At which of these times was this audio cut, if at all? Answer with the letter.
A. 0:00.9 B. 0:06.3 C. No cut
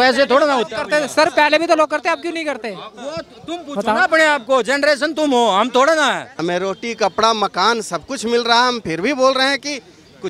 B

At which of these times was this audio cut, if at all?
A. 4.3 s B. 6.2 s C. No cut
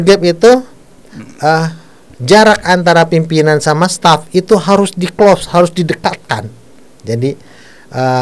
C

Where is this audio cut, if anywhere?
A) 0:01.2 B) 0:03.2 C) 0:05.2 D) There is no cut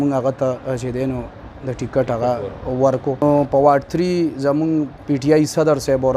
B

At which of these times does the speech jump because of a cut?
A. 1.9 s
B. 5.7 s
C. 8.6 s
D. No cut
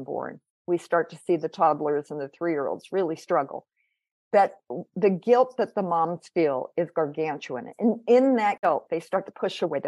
C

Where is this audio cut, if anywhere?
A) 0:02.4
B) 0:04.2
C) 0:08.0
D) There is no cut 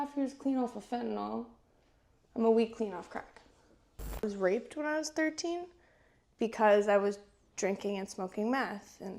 B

